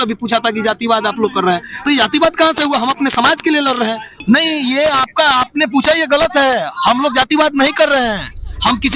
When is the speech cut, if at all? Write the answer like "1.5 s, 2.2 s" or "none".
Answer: 4.1 s